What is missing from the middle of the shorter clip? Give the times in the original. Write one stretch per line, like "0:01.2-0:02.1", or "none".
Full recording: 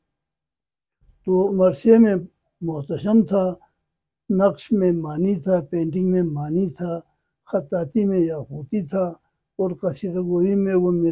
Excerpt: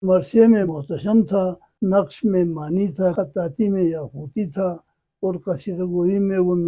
0:02.7-0:03.7
0:05.6-0:07.5